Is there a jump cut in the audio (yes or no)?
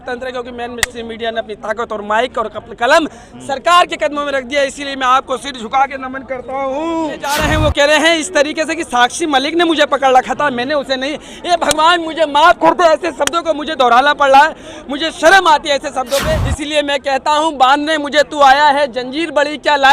yes